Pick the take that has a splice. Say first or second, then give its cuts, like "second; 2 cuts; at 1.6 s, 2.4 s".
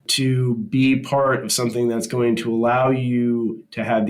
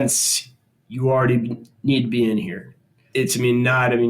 second; 1 cut; at 3.0 s